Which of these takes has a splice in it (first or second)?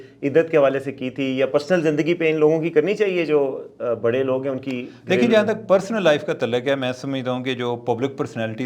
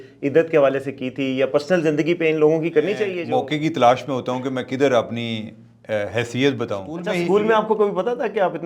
second